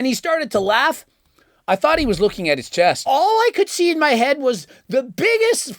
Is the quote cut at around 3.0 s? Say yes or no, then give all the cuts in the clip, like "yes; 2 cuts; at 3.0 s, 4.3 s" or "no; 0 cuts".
yes; 1 cut; at 3.0 s